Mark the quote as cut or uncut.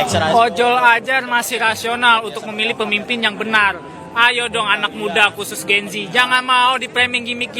uncut